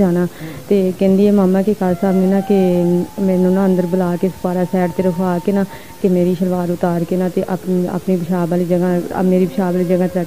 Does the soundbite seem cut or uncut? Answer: uncut